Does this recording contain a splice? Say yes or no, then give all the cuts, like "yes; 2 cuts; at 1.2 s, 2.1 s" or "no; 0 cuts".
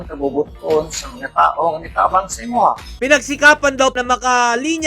no; 0 cuts